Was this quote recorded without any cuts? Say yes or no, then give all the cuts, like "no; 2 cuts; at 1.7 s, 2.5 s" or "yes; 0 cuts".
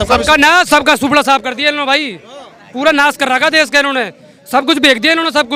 yes; 0 cuts